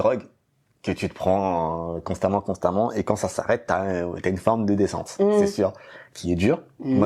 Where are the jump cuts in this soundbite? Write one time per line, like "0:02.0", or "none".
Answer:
none